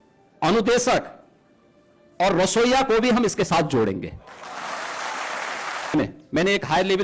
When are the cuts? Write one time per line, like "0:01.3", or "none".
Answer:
0:05.9